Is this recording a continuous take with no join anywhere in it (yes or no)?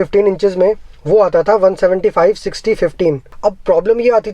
no